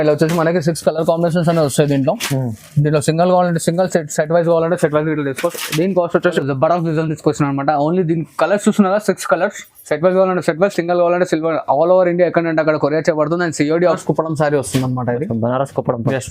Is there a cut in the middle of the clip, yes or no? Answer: yes